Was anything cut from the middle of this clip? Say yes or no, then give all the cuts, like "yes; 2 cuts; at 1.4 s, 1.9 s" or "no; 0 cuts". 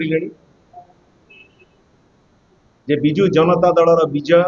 no; 0 cuts